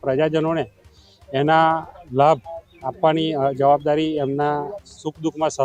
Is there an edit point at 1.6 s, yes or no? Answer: no